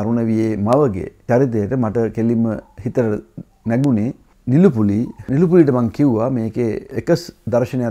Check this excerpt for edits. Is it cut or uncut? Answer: cut